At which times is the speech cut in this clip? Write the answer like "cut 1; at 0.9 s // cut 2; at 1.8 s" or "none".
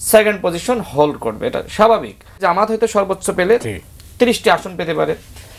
cut 1; at 2.4 s